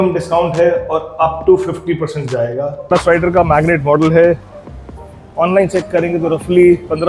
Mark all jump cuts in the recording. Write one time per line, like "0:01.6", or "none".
0:02.9